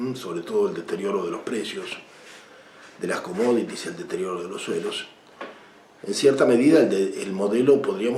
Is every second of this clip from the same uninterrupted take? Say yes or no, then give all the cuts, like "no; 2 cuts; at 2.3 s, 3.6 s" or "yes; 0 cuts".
yes; 0 cuts